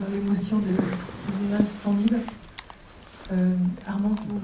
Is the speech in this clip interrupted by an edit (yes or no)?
yes